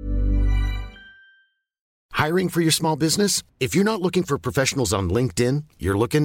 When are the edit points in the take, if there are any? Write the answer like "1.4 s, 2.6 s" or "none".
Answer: 1.9 s